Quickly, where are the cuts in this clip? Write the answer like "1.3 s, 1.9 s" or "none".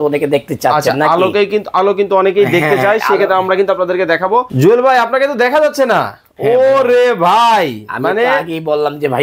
4.5 s